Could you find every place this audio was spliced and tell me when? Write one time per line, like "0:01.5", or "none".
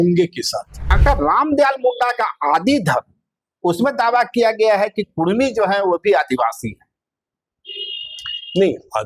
0:01.0